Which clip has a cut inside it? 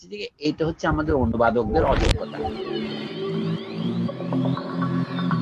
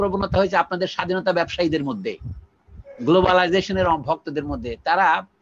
first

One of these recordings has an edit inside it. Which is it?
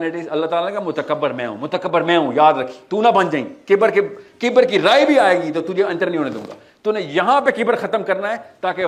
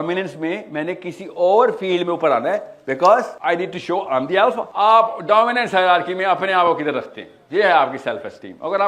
second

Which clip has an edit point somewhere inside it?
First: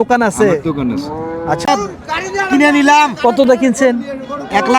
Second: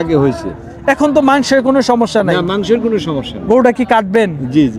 first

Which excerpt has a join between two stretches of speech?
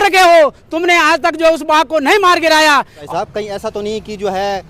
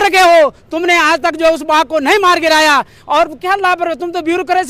first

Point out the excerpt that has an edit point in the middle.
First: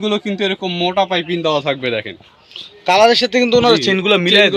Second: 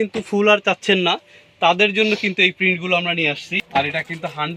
second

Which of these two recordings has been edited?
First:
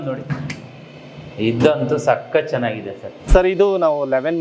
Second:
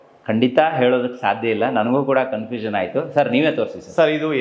first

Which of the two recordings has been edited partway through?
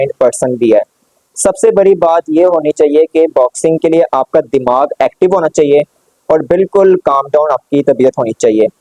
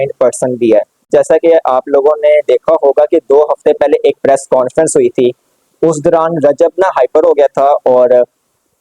second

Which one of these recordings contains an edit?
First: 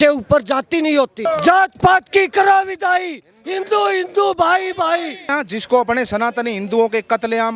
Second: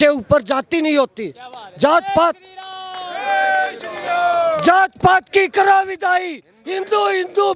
first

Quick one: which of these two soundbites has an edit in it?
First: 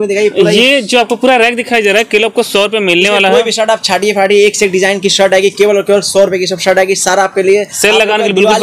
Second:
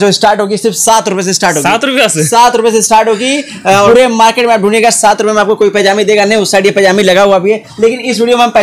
second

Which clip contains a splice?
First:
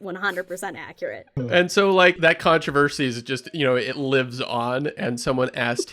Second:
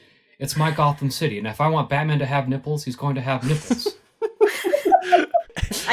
first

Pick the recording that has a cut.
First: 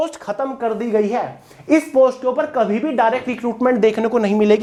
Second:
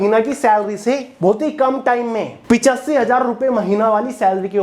second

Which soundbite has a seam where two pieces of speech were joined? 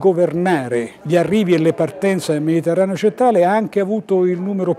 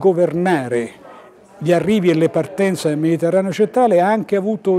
first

